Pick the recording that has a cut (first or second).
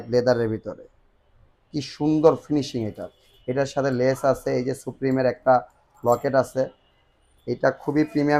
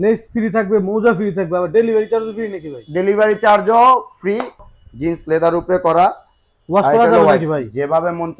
second